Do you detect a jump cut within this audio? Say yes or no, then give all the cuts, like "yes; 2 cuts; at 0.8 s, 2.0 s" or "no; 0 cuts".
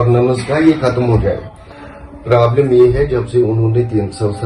no; 0 cuts